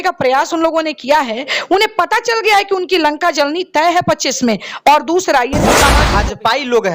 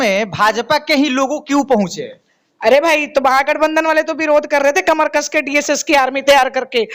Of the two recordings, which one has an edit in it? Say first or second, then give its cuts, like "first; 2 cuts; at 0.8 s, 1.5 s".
first; 1 cut; at 6.0 s